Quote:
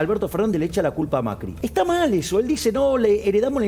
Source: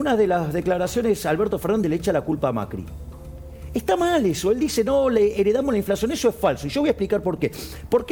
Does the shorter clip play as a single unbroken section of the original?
no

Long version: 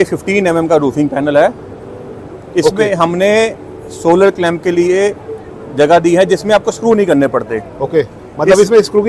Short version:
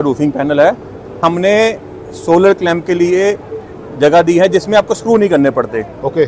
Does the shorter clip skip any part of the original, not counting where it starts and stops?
yes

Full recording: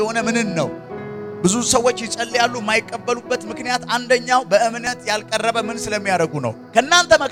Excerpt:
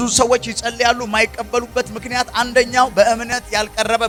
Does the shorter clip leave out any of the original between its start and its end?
no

